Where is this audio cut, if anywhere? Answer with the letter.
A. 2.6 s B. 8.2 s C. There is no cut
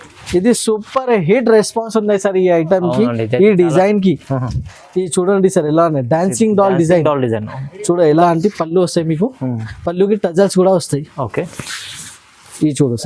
B